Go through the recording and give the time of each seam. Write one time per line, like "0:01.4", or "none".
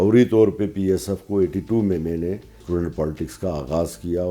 0:02.6